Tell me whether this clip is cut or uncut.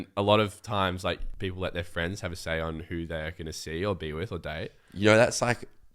cut